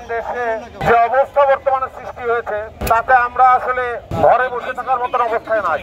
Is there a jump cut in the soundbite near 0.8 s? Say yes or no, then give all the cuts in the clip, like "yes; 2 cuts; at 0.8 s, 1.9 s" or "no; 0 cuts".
yes; 3 cuts; at 0.8 s, 2.8 s, 4.1 s